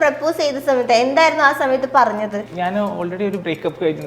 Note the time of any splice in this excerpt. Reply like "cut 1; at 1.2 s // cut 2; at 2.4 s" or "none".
cut 1; at 2.5 s